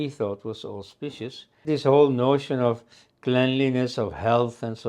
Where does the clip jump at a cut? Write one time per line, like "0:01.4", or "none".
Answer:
0:01.7

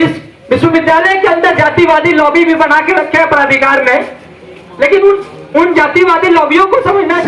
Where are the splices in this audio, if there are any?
none

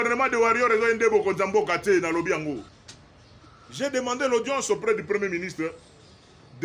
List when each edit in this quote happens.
0:02.7

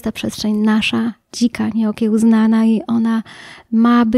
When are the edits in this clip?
none

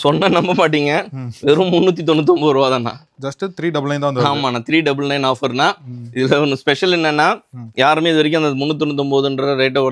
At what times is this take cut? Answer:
none

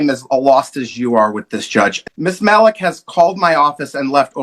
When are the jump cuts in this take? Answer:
0:02.0

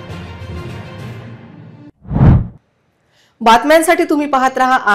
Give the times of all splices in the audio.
none

